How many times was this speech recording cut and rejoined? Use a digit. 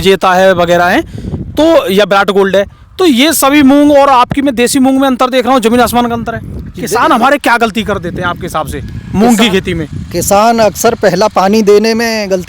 1